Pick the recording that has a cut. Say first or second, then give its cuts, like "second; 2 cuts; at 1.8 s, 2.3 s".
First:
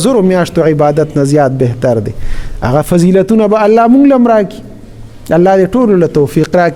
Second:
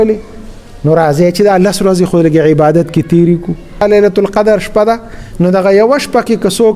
second; 1 cut; at 3.8 s